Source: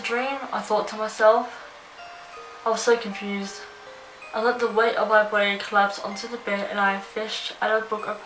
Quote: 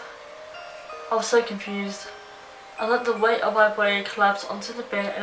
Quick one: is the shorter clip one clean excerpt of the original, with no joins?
yes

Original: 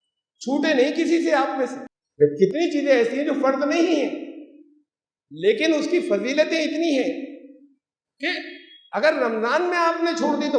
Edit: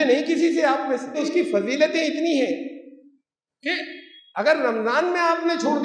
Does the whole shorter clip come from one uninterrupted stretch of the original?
no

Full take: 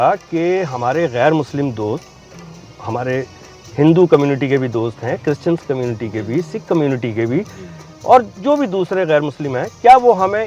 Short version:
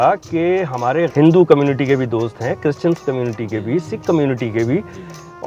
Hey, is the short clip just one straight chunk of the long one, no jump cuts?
no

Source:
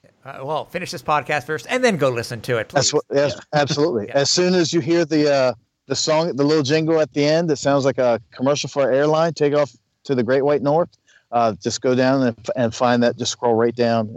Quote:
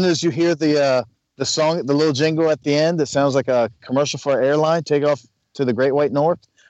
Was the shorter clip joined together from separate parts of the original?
no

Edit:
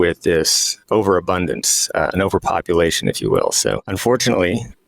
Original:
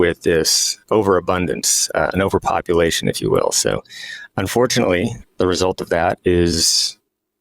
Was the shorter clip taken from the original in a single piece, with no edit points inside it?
no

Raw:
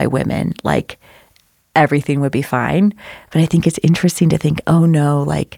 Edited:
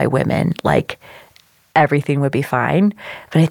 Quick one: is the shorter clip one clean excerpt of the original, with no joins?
yes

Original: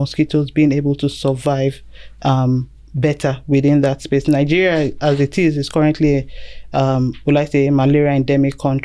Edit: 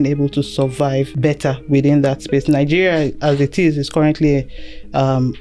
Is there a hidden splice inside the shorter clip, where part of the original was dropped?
yes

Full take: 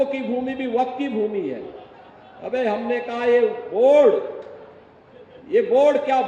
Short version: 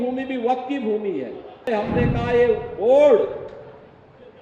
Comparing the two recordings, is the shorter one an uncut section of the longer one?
no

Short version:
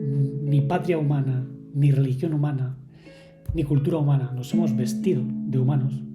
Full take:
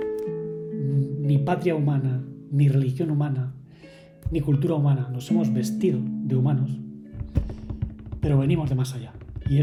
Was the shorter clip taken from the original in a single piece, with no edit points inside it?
yes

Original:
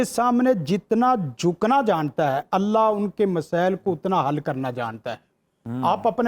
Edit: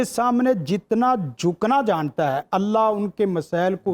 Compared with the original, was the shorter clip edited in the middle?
no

